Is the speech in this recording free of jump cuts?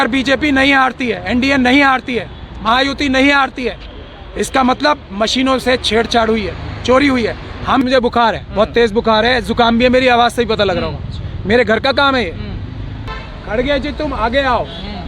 no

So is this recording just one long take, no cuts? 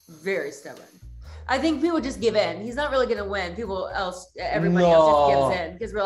yes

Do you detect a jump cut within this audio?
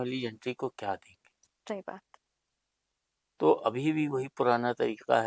no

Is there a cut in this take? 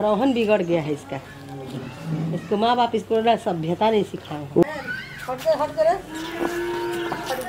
yes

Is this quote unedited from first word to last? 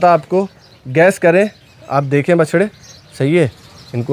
yes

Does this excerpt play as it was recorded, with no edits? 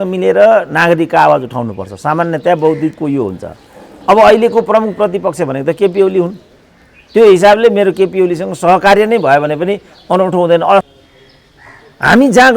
no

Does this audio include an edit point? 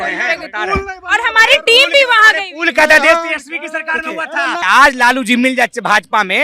yes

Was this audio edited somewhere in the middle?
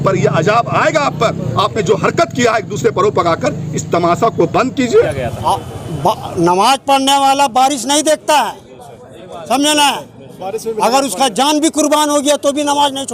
yes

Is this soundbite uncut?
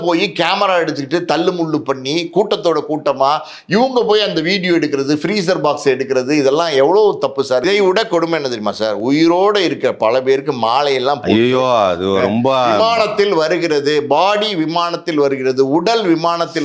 no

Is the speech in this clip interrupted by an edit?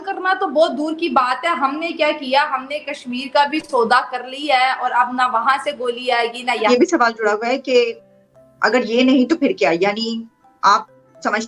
yes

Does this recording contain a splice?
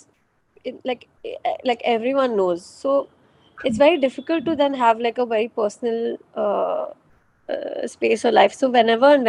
no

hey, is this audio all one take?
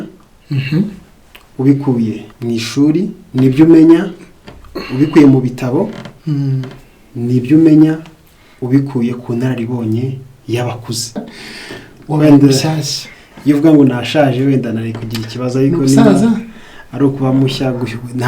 no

